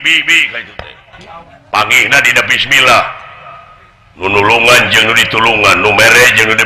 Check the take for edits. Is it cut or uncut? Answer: cut